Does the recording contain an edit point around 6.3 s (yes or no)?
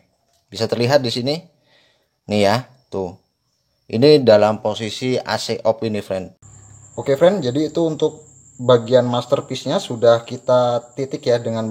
yes